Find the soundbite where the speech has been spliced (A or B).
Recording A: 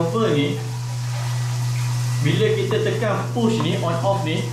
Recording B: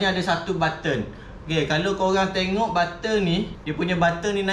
B